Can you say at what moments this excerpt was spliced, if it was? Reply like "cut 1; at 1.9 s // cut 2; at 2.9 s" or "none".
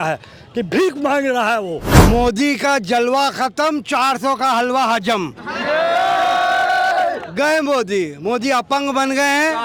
cut 1; at 1.9 s